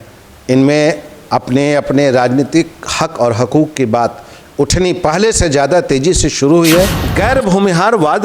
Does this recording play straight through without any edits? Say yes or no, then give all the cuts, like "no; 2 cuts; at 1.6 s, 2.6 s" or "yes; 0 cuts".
no; 1 cut; at 7.0 s